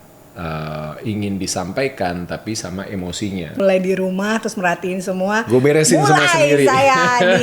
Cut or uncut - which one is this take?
cut